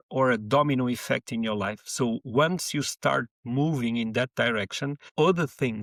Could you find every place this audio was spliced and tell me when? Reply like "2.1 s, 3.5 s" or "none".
none